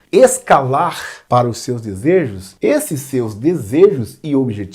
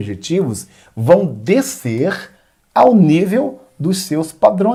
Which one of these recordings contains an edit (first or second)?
first